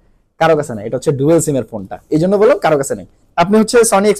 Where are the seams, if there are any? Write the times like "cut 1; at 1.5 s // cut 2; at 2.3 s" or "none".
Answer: cut 1; at 3.2 s